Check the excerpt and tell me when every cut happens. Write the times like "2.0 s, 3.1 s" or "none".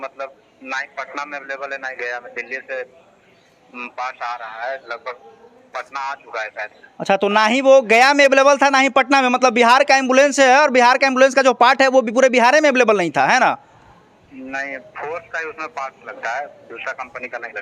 none